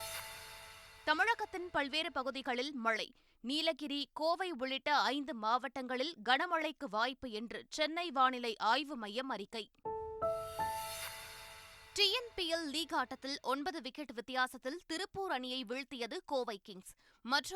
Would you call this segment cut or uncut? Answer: cut